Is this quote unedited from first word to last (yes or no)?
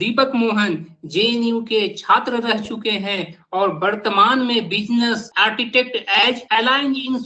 yes